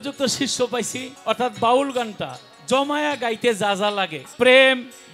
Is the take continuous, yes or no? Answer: no